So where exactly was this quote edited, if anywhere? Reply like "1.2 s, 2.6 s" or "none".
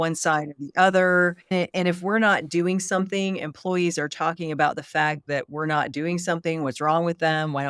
1.5 s